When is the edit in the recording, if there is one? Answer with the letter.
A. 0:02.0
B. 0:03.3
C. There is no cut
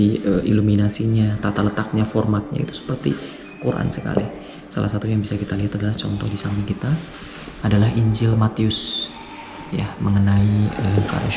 C